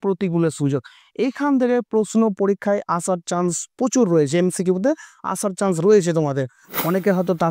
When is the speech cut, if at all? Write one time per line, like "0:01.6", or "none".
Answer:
0:06.6